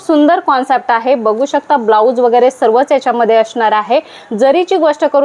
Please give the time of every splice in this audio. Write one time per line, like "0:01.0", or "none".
none